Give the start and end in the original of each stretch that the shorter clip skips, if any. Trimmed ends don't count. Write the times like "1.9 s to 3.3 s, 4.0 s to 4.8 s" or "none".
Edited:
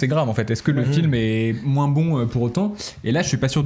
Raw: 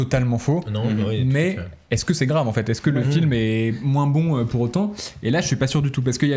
none